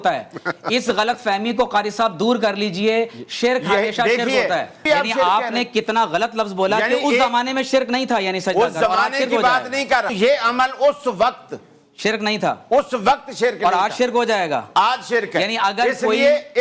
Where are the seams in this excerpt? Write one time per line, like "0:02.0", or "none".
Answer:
0:04.8
0:10.1